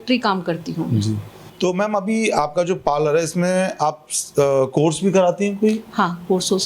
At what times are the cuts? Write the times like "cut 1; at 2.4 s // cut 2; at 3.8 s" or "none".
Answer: cut 1; at 1.4 s